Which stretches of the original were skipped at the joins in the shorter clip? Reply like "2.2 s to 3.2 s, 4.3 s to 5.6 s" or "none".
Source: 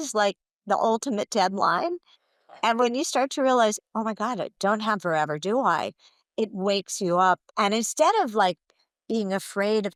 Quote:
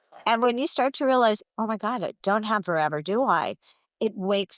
none